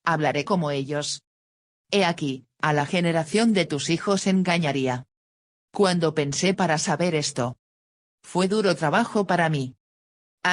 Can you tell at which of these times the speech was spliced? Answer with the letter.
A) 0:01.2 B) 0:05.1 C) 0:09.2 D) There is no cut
A